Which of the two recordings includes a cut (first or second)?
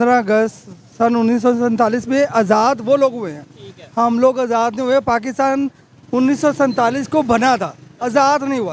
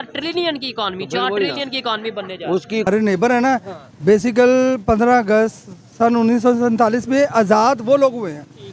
second